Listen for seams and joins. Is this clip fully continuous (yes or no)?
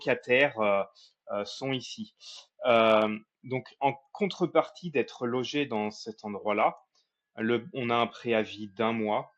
yes